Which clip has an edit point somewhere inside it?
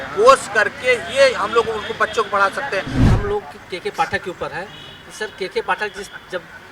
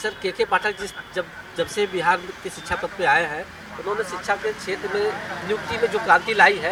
first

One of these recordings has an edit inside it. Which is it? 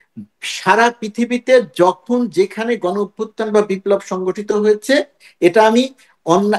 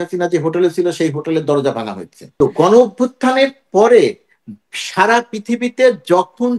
second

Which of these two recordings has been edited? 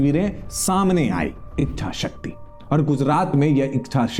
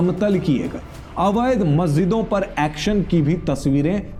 first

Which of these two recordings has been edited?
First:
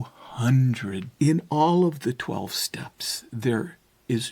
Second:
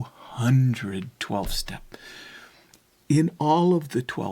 first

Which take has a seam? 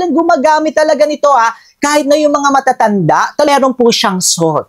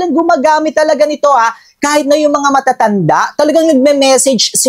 first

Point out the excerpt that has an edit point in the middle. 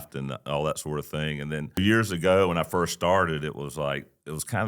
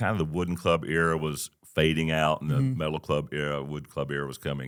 first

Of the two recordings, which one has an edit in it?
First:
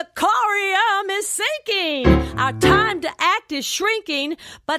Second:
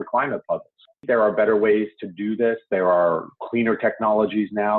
second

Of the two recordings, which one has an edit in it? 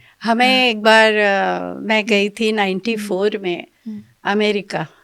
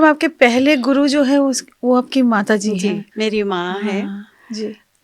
second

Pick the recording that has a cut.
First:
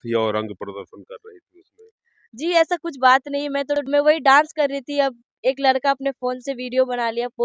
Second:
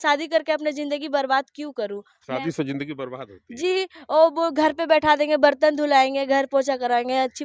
first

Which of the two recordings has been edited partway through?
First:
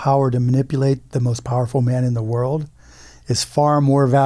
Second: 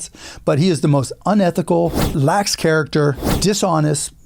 second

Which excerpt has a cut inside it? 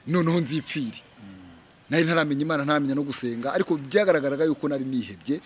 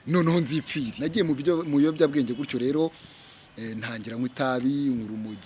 second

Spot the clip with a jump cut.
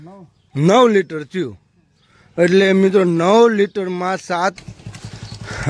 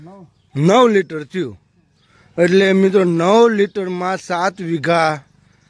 first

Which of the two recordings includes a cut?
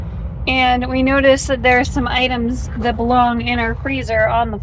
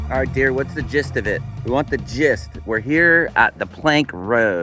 second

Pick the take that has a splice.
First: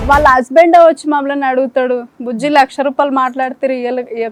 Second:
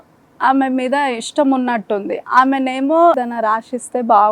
second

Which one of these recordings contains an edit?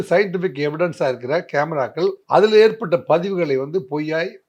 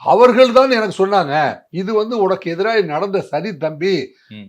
second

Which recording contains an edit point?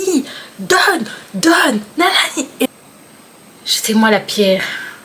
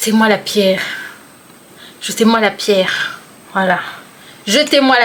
first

